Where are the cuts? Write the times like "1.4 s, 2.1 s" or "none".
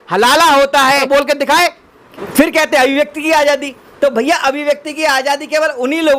2.1 s